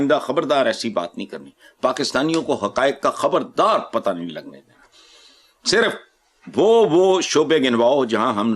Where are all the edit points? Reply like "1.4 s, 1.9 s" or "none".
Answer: none

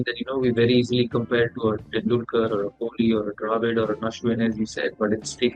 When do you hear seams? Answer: none

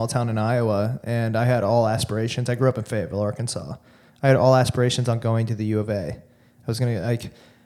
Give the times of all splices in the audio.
none

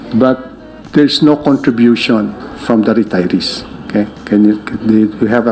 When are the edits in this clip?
none

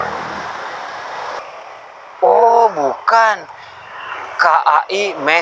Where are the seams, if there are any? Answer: 1.4 s

